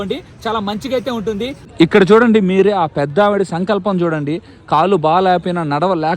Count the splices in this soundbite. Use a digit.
1